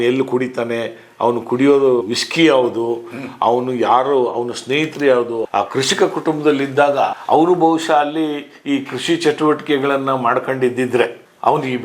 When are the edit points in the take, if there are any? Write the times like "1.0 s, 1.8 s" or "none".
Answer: 2.0 s, 5.4 s, 7.2 s

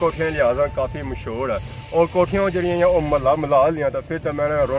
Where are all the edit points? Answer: none

